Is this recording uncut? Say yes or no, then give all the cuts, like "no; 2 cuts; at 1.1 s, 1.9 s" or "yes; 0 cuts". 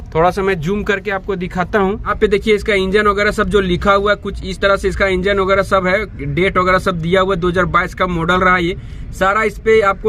yes; 0 cuts